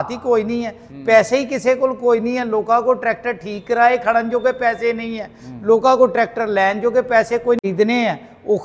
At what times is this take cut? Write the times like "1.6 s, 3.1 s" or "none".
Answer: 7.6 s